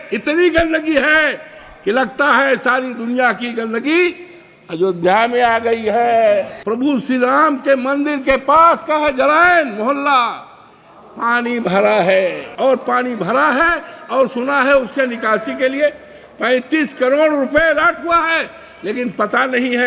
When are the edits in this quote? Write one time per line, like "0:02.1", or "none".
0:06.6
0:12.4